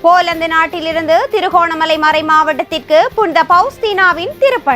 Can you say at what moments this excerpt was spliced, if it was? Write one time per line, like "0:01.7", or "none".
none